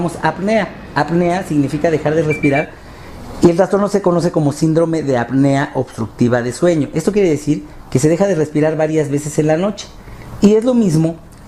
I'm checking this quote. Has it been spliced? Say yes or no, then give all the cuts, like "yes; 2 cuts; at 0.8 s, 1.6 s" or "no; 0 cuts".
no; 0 cuts